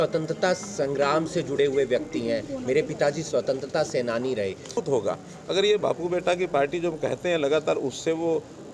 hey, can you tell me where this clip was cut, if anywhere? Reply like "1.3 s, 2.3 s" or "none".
4.8 s

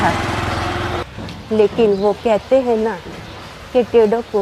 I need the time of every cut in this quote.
1.0 s

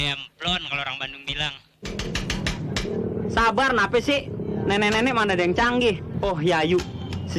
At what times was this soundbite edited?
2.0 s, 6.1 s

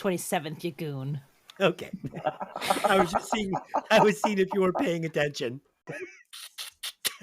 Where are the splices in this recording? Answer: 6.0 s

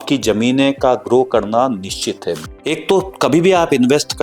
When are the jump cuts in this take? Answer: 2.4 s

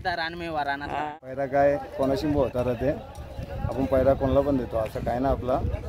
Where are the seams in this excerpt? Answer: 0.9 s

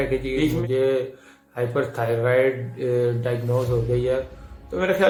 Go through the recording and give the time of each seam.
none

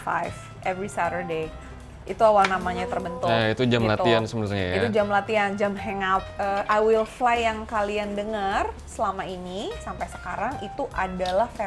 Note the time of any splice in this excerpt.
6.3 s

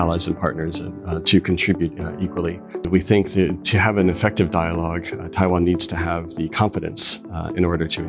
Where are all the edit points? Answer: 2.9 s

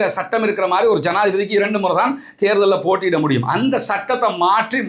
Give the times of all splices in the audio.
none

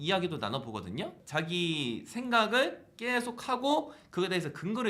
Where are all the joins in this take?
1.2 s

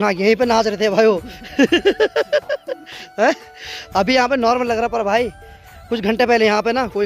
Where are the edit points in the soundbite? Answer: none

